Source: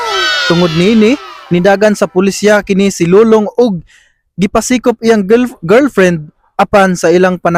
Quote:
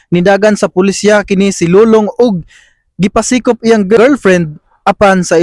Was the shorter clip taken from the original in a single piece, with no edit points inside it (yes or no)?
no